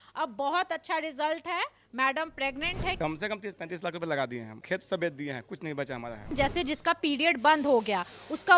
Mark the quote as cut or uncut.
cut